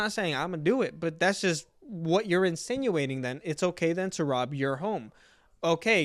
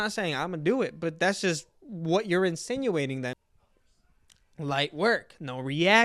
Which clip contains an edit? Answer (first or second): second